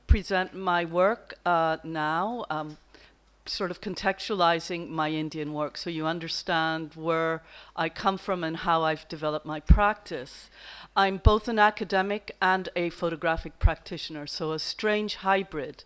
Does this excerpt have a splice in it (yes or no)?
no